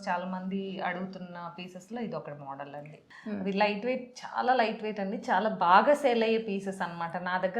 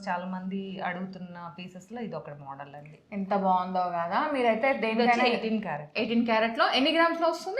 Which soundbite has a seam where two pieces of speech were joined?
first; 1 cut; at 3.0 s

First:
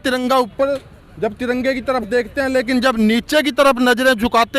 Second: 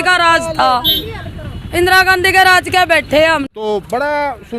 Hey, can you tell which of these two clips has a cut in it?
second; 1 cut; at 3.4 s

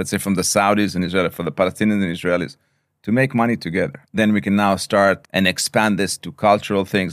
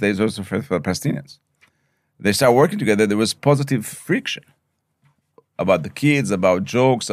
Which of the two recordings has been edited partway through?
first; 2 cuts; at 4.0 s, 5.3 s

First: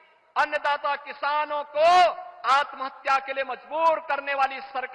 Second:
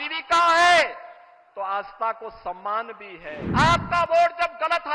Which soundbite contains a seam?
second; 1 cut; at 3.4 s

